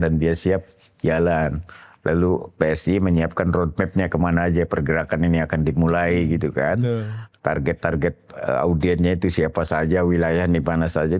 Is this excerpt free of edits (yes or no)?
yes